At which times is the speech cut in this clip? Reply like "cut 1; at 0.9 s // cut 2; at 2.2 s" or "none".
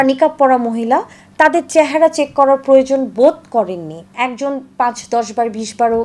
cut 1; at 4.1 s